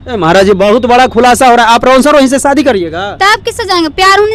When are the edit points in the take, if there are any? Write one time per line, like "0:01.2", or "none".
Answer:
none